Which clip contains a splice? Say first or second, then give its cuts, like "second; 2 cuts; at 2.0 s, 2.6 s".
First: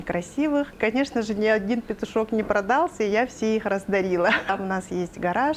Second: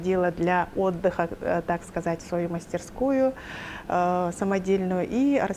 first; 2 cuts; at 0.8 s, 4.5 s